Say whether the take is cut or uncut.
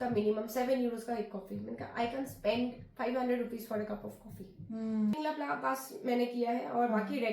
cut